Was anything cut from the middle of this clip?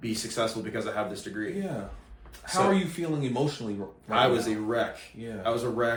no; 0 cuts

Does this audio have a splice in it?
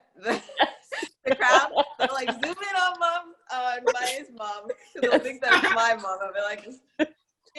no; 0 cuts

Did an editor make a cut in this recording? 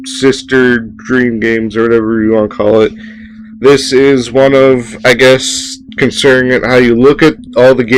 no; 0 cuts

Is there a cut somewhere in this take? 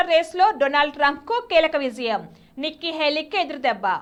no; 0 cuts

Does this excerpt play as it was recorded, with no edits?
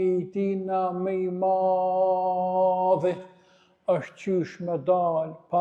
yes; 0 cuts

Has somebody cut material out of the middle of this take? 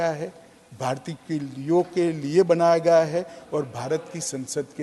no; 0 cuts

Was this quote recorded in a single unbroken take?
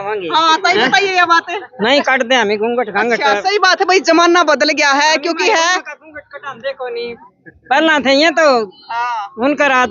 yes; 0 cuts

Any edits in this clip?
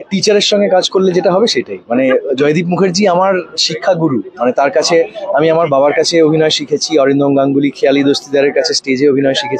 no; 0 cuts

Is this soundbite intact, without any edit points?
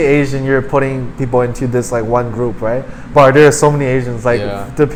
yes; 0 cuts

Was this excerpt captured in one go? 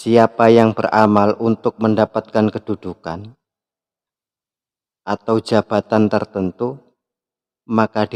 yes; 0 cuts

